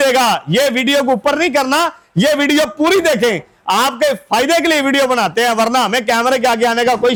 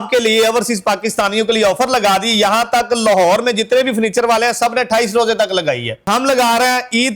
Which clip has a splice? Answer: second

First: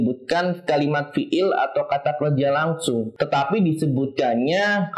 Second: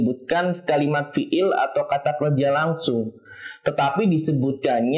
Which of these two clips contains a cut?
first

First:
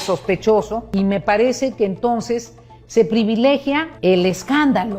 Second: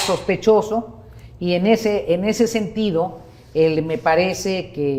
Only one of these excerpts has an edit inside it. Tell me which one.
first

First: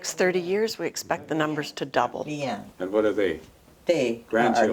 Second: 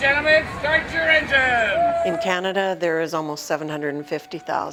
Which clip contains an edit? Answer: first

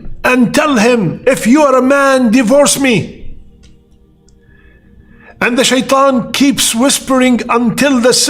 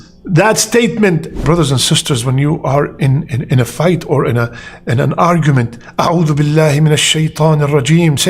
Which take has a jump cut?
second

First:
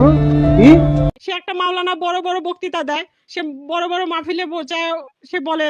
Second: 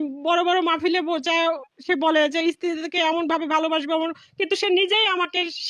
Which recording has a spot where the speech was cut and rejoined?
first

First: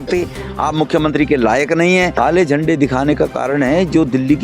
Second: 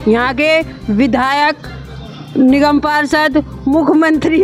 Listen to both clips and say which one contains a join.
first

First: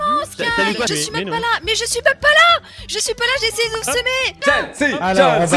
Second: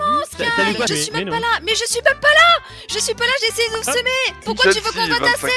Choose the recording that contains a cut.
second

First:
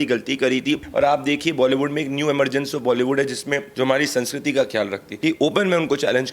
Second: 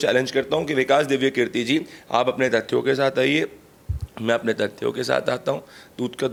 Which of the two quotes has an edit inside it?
first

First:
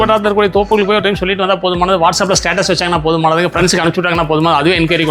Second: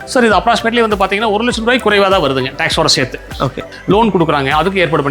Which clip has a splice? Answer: second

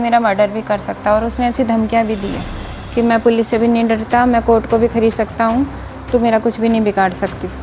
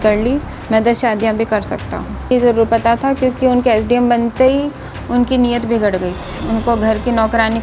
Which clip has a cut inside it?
second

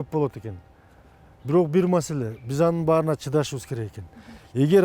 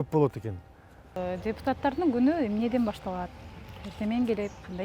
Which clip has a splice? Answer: second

